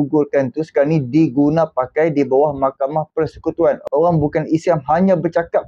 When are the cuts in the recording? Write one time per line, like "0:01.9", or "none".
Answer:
0:03.8